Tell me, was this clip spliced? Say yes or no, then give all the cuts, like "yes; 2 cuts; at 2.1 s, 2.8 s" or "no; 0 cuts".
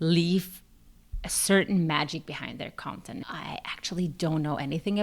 yes; 1 cut; at 3.2 s